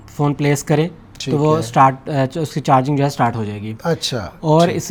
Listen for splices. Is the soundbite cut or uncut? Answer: uncut